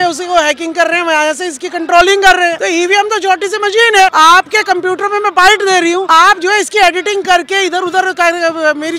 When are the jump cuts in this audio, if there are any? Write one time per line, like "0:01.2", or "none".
0:02.6
0:04.1
0:06.1

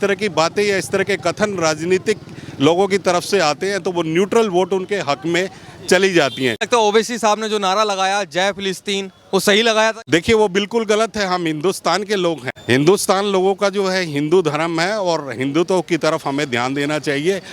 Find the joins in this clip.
0:06.6
0:10.0
0:12.5

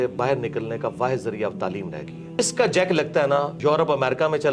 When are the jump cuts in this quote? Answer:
0:02.4
0:03.5

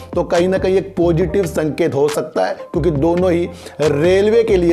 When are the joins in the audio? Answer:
none

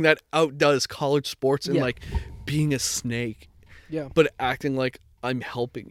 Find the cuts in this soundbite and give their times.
none

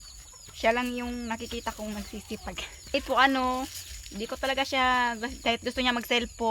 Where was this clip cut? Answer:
0:02.9

